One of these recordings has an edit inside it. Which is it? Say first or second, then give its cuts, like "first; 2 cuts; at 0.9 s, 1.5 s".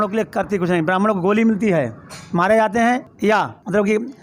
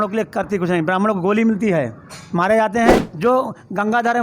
second; 1 cut; at 3.1 s